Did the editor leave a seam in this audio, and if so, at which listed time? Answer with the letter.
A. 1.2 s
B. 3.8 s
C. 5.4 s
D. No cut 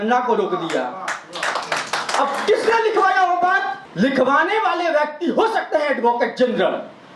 B